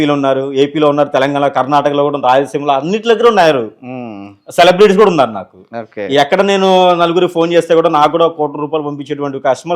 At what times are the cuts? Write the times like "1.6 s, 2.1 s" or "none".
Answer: none